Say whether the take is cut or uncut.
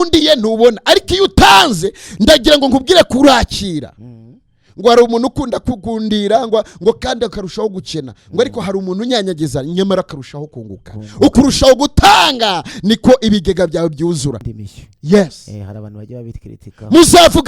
cut